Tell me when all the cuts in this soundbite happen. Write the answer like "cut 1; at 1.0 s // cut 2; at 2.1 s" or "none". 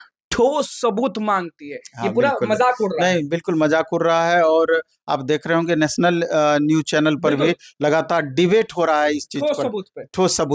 none